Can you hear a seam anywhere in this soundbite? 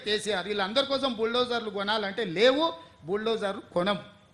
no; 0 cuts

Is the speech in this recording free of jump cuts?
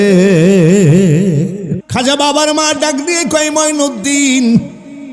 no; 1 cut; at 1.8 s

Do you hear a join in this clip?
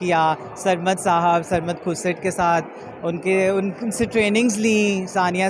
no; 0 cuts

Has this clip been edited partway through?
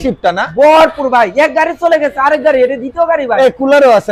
no; 0 cuts

